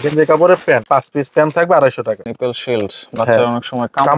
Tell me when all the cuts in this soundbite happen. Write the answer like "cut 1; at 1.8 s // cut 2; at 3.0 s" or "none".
cut 1; at 0.8 s // cut 2; at 2.2 s